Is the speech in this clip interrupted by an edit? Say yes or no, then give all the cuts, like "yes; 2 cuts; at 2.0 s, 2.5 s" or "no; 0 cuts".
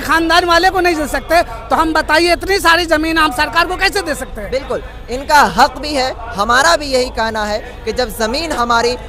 no; 0 cuts